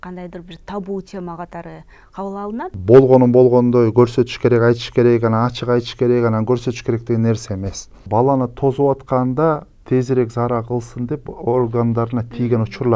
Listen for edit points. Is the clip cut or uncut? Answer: cut